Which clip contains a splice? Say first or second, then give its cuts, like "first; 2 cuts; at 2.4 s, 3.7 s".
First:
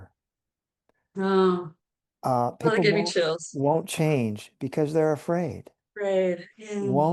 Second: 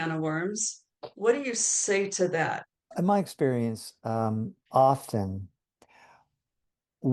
second; 2 cuts; at 2.9 s, 4.6 s